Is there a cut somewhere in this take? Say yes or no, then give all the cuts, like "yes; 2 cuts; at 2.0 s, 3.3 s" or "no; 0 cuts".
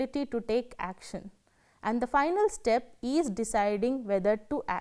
no; 0 cuts